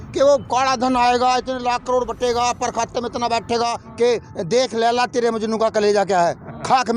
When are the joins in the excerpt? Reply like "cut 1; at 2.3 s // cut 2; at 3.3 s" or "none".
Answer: cut 1; at 3.8 s